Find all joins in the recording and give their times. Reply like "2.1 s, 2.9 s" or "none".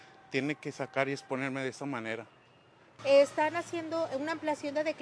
2.9 s